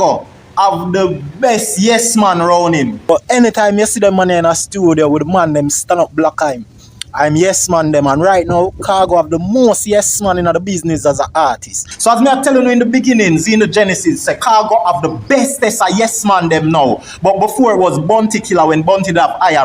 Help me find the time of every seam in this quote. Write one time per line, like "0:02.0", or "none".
0:03.0
0:11.8